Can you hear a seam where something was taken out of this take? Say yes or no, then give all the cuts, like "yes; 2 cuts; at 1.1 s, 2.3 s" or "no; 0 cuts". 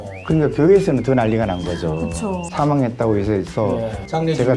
yes; 1 cut; at 2.4 s